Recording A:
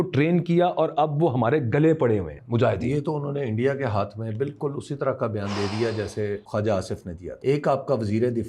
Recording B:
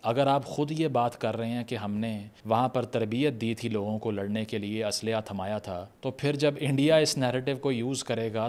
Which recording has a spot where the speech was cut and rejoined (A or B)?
A